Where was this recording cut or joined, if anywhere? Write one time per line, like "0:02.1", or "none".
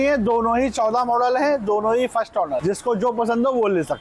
0:02.6